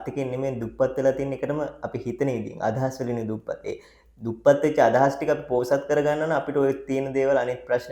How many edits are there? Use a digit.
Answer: 0